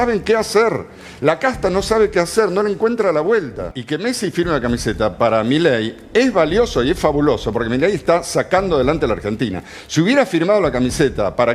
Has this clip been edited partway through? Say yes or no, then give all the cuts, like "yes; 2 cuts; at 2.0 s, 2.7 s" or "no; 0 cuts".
yes; 1 cut; at 3.7 s